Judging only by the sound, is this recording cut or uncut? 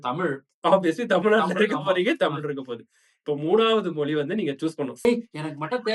cut